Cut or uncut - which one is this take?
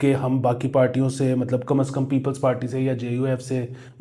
uncut